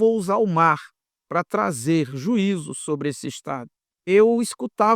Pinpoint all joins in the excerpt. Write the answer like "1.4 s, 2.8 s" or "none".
3.4 s